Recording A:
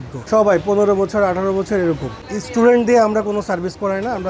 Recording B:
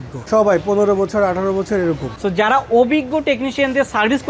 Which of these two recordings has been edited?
B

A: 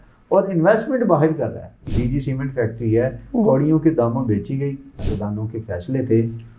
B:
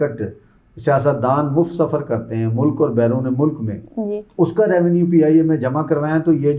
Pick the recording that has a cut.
A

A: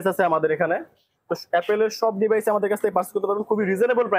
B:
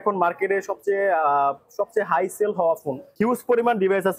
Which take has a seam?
B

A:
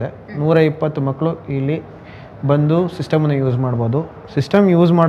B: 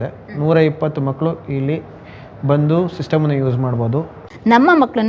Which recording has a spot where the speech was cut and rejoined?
B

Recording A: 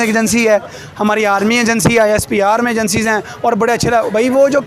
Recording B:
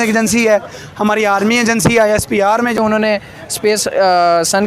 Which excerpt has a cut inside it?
B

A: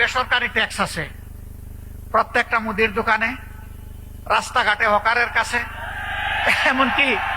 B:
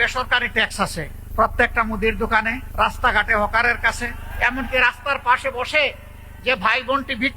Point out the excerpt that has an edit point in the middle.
B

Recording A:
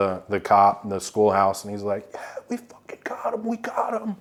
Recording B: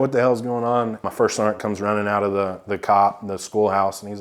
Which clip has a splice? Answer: B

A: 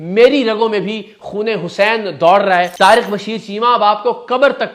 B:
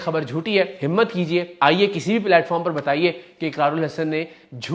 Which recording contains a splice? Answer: A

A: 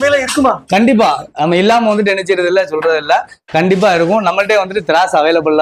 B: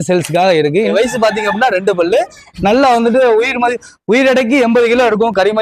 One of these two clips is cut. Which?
B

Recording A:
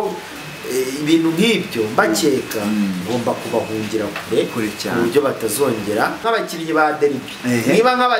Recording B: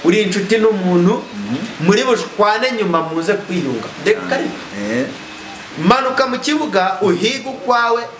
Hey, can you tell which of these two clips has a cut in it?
A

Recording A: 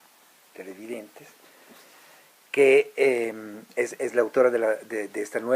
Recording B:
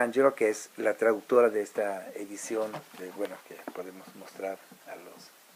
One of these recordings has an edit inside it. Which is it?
A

